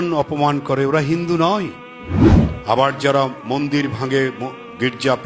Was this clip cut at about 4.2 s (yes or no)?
no